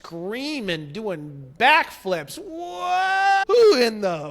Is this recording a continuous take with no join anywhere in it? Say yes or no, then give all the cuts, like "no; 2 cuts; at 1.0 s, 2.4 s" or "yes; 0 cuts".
no; 1 cut; at 3.4 s